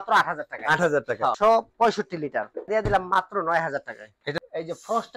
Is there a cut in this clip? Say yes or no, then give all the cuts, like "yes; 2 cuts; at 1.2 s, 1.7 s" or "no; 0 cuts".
yes; 3 cuts; at 1.3 s, 2.7 s, 4.4 s